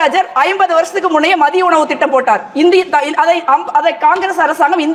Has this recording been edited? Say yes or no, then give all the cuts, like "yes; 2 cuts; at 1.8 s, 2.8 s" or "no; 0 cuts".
no; 0 cuts